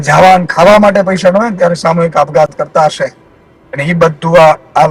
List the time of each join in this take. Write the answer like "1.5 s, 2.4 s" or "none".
none